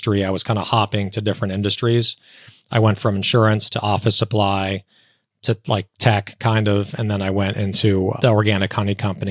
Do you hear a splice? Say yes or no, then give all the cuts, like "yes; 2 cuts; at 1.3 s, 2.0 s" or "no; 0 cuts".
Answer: yes; 1 cut; at 8.2 s